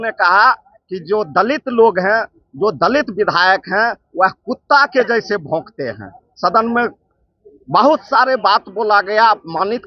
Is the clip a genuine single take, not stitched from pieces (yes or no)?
yes